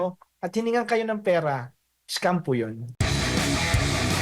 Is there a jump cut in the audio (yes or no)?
yes